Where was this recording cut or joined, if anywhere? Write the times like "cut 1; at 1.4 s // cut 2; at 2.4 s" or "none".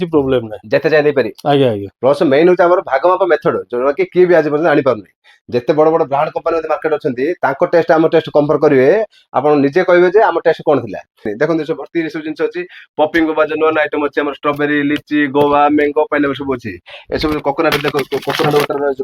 cut 1; at 1.9 s // cut 2; at 11.3 s